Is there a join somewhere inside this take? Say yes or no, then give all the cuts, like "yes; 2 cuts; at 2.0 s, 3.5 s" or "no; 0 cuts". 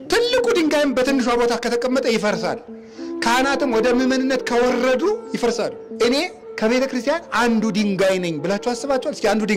yes; 1 cut; at 5.8 s